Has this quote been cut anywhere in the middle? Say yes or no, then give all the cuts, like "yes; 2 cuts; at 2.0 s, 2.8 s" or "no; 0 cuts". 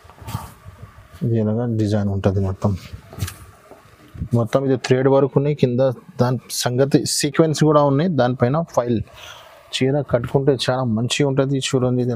no; 0 cuts